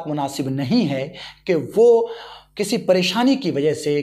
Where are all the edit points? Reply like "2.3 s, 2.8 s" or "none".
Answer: none